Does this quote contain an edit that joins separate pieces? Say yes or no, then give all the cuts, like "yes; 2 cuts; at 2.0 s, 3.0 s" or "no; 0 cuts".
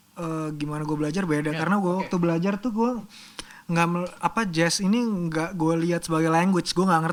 no; 0 cuts